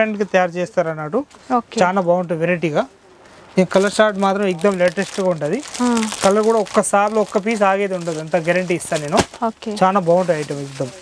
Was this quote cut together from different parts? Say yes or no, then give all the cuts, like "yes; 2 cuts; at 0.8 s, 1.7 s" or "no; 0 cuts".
no; 0 cuts